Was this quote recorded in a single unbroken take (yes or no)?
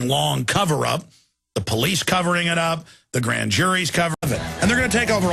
yes